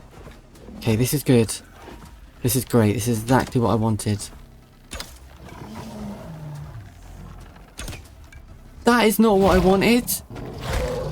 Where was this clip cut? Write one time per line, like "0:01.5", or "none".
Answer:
0:08.8
0:10.2